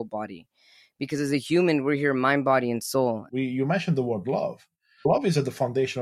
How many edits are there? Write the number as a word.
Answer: two